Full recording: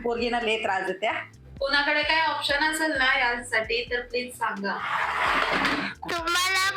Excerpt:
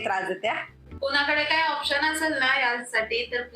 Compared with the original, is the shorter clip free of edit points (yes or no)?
yes